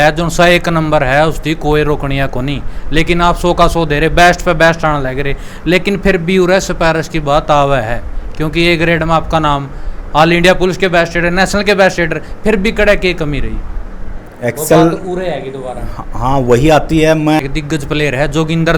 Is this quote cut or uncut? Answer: cut